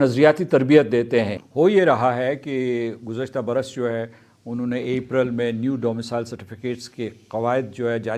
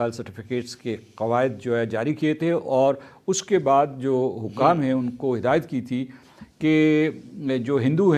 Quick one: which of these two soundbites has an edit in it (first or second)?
first